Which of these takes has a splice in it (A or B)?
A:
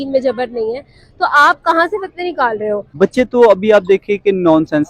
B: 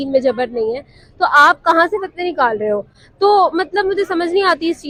A